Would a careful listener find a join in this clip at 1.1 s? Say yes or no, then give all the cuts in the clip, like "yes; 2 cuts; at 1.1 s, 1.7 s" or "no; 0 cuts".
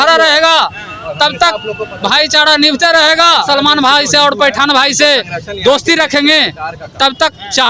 no; 1 cut; at 3.5 s